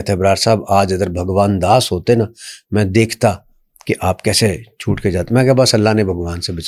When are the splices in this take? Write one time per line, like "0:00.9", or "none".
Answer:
none